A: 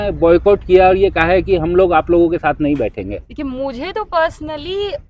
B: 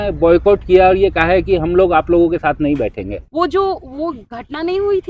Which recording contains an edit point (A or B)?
B